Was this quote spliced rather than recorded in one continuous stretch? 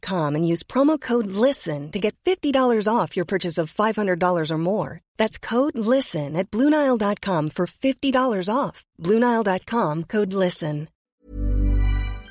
yes; 1 cut; at 10.9 s

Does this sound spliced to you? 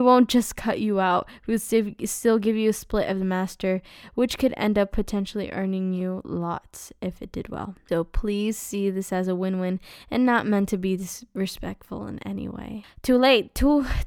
no; 0 cuts

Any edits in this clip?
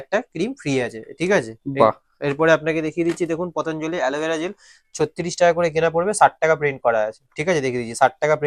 no; 0 cuts

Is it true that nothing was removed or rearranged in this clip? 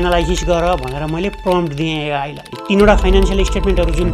no; 1 cut; at 2.6 s

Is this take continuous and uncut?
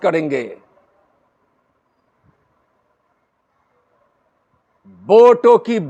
yes; 0 cuts

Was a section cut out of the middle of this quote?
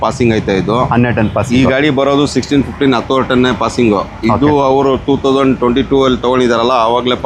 no; 0 cuts

